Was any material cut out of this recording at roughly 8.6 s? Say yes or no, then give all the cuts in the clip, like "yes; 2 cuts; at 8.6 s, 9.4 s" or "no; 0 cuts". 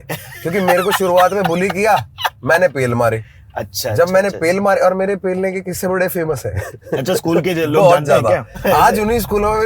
yes; 1 cut; at 8.6 s